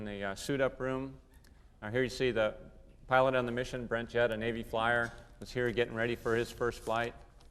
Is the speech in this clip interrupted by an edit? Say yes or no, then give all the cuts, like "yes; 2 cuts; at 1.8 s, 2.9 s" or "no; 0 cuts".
yes; 1 cut; at 2.5 s